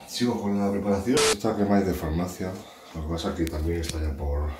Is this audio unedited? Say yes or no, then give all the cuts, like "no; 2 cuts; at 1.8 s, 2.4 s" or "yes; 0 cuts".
no; 1 cut; at 1.2 s